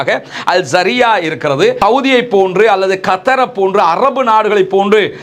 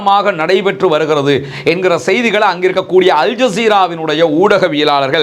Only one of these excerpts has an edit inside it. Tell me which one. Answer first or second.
first